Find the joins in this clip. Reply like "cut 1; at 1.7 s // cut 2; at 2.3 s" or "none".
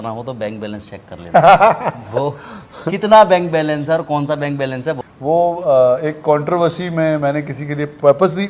cut 1; at 5.0 s